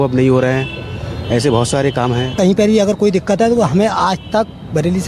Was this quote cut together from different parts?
yes; 1 cut; at 2.3 s

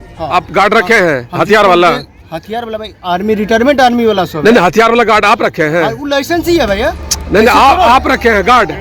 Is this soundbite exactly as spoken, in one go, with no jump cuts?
yes; 0 cuts

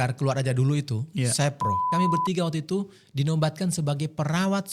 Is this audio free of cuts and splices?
no; 1 cut; at 1.8 s

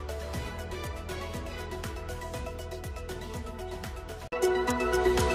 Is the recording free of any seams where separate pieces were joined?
yes; 0 cuts

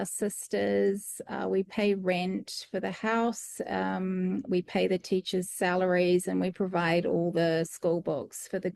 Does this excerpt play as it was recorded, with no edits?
yes; 0 cuts

